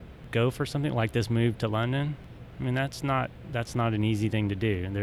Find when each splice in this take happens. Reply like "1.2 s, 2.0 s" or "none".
none